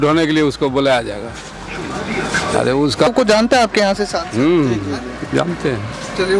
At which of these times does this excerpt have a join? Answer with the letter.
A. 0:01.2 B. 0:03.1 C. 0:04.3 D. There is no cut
B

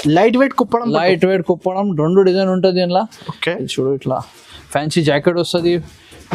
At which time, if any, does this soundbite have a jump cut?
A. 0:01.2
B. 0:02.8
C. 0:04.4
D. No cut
D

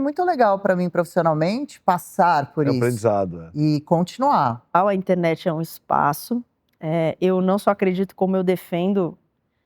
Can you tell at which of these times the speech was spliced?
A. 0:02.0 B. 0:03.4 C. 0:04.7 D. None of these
C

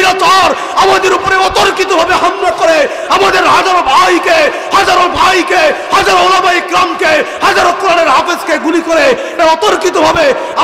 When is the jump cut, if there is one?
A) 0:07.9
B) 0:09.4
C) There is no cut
B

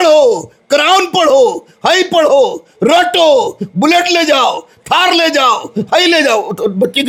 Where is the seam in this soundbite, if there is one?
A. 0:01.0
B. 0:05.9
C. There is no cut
C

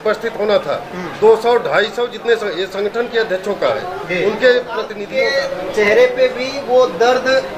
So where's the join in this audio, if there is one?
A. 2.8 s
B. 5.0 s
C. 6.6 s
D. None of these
B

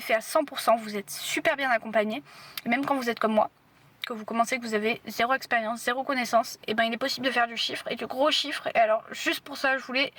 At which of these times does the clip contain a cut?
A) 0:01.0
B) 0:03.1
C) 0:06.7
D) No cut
D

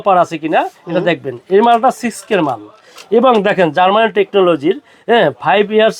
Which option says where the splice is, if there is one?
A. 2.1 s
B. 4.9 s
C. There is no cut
C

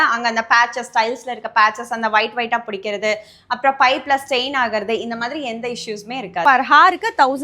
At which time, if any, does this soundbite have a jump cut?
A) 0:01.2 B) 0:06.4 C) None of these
B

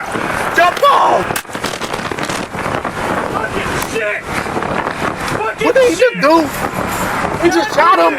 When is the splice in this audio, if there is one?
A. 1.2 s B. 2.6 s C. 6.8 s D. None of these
A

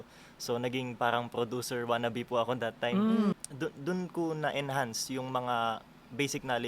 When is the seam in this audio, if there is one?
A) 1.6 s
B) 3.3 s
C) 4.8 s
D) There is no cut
B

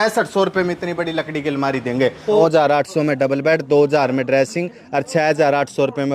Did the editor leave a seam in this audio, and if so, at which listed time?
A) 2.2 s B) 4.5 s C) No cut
A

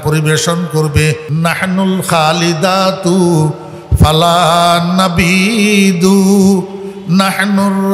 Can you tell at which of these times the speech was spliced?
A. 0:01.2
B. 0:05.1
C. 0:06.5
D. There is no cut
A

